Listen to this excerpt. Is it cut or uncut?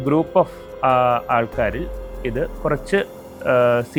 uncut